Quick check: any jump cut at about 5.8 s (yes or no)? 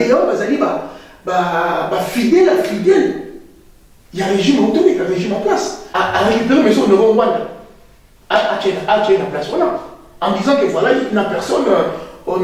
yes